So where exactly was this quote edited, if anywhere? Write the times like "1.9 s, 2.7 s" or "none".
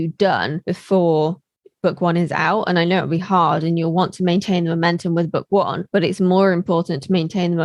none